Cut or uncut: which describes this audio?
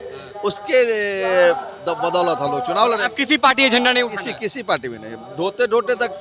uncut